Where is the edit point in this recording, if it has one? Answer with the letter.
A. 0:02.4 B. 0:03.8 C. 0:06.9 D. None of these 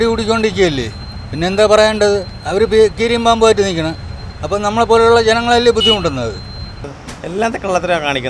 C